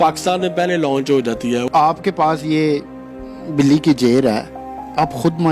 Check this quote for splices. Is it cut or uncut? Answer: cut